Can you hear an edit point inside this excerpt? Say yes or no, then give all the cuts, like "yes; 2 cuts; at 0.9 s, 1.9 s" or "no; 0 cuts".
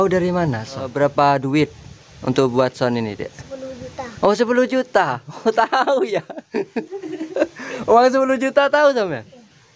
yes; 1 cut; at 0.9 s